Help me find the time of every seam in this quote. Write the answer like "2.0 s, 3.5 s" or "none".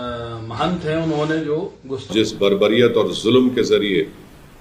2.1 s